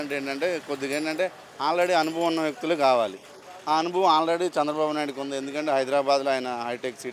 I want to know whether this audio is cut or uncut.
uncut